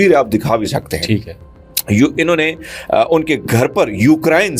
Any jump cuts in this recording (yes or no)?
no